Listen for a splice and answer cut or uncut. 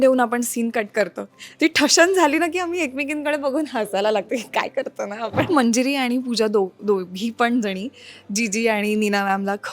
cut